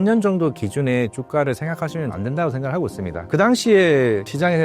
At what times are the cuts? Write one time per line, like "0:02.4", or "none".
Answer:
0:02.1